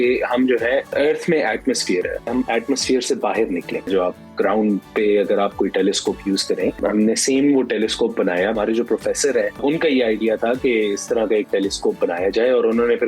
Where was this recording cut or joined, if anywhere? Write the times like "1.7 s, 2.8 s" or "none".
0.9 s, 2.3 s, 3.9 s, 6.8 s, 8.5 s, 9.6 s